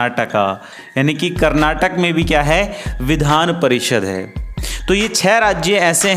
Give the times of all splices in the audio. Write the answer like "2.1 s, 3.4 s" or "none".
none

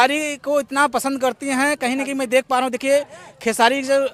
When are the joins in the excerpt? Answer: none

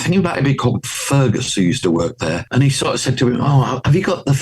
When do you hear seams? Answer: 2.4 s

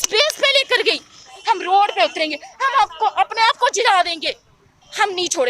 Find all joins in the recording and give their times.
1.3 s

